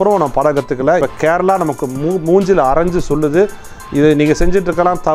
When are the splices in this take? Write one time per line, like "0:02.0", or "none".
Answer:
0:01.0